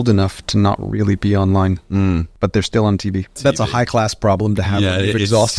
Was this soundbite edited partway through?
yes; 2 cuts; at 2.3 s, 3.4 s

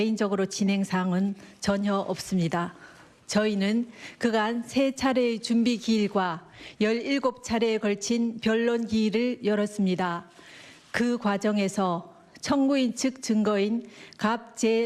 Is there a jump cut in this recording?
yes; 1 cut; at 8.1 s

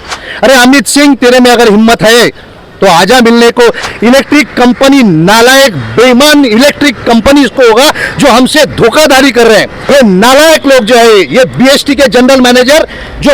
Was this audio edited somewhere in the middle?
yes; 2 cuts; at 3.8 s, 9.8 s

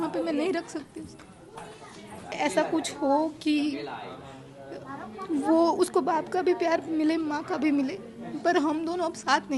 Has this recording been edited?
yes; 1 cut; at 2.3 s

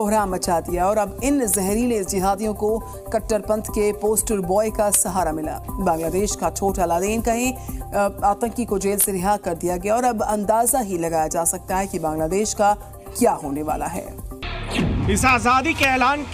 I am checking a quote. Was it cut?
no; 0 cuts

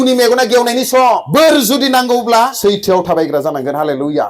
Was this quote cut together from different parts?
yes; 2 cuts; at 1.2 s, 2.5 s

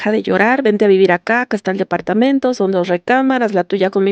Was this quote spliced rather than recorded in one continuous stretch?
no; 0 cuts

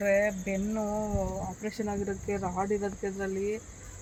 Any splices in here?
no; 0 cuts

